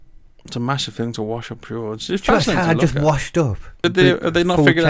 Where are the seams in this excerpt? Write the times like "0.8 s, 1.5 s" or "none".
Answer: 3.6 s